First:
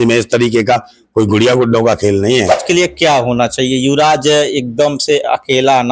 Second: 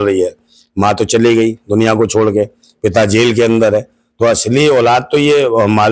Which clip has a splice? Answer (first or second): first